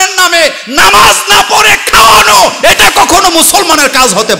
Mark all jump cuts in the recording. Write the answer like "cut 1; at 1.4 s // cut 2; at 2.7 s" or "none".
none